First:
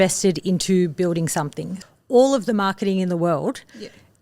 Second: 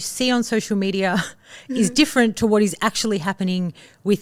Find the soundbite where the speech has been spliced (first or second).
first